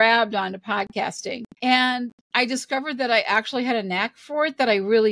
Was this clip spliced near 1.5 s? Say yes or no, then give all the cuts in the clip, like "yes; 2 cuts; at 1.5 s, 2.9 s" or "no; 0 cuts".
yes; 1 cut; at 1.5 s